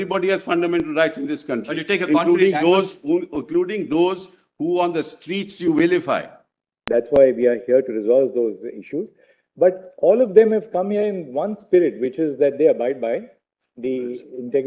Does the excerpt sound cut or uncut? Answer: cut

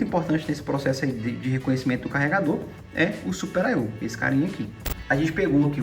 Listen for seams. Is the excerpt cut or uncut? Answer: cut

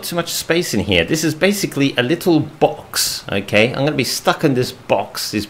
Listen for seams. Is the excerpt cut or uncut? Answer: uncut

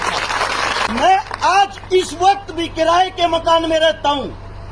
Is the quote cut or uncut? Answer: cut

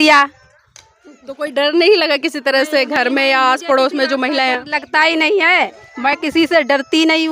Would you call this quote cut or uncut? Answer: uncut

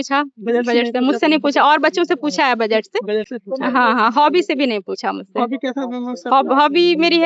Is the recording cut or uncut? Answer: uncut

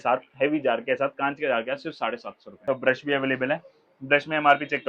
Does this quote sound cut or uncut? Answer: cut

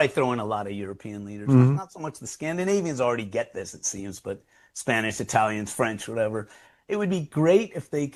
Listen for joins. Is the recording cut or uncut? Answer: uncut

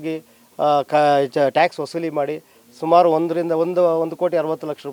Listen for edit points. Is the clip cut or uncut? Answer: uncut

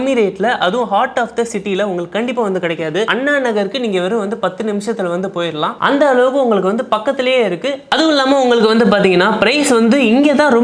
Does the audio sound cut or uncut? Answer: uncut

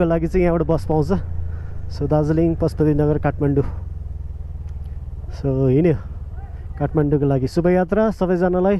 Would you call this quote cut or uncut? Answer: uncut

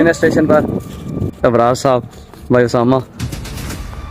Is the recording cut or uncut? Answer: cut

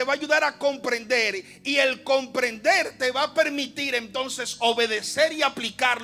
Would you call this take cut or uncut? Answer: uncut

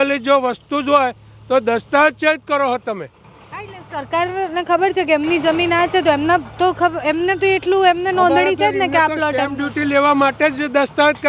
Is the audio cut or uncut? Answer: uncut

